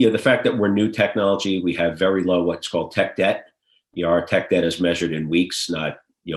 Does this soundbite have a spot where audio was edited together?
no; 0 cuts

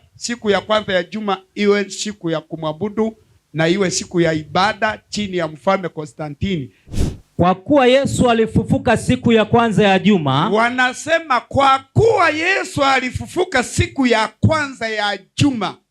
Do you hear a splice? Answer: yes; 1 cut; at 6.8 s

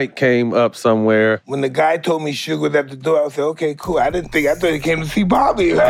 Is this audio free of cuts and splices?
no; 1 cut; at 1.5 s

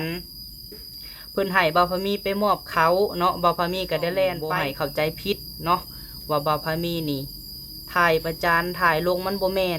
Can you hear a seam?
yes; 1 cut; at 4.5 s

